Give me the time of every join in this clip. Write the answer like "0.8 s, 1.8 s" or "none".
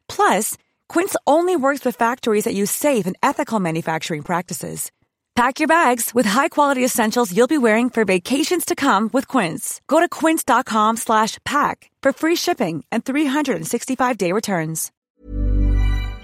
14.9 s